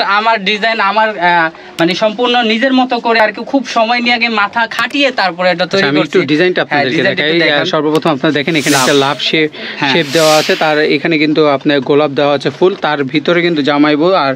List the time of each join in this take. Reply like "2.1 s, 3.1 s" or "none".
none